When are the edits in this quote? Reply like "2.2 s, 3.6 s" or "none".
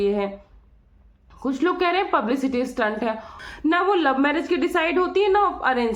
3.4 s